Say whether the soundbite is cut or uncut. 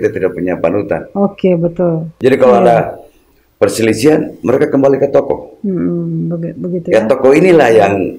cut